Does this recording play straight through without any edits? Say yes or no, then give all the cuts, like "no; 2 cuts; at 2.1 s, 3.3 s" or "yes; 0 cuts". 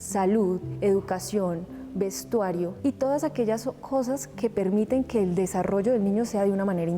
no; 1 cut; at 2.7 s